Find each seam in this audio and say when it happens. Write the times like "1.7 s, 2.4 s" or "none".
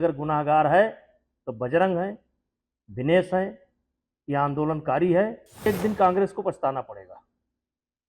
5.7 s